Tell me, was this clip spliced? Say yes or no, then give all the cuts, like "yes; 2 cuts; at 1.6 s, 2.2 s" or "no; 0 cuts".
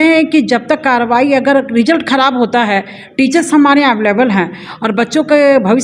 no; 0 cuts